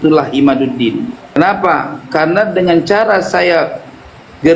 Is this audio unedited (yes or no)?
no